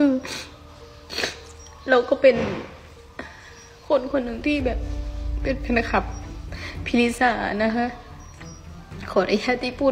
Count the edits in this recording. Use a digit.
0